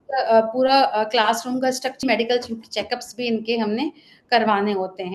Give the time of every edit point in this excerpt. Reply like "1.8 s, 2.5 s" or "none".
2.0 s